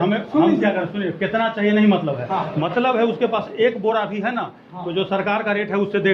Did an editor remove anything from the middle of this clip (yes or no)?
no